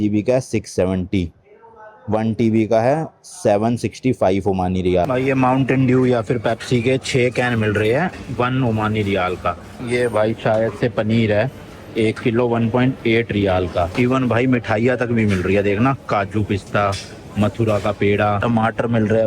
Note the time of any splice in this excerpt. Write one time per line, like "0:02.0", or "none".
0:05.1
0:09.8
0:13.9
0:18.4